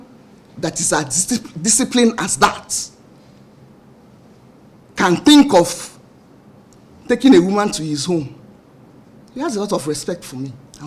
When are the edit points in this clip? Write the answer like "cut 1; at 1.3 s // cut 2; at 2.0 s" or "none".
none

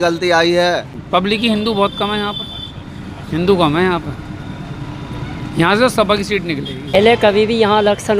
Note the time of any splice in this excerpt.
cut 1; at 0.9 s // cut 2; at 6.9 s

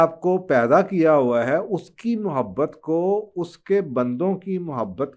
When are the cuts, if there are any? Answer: none

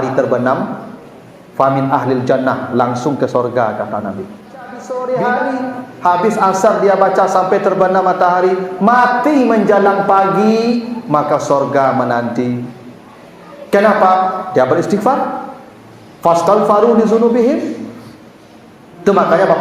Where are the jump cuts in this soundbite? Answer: cut 1; at 4.9 s

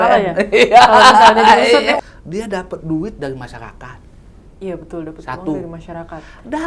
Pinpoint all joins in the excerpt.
cut 1; at 2.0 s

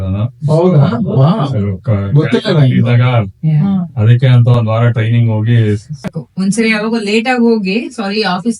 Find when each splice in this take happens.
cut 1; at 6.2 s

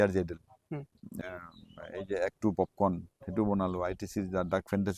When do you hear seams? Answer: cut 1; at 1.1 s

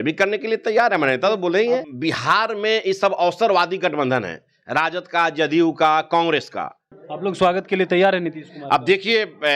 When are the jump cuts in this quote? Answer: cut 1; at 1.9 s // cut 2; at 7.0 s

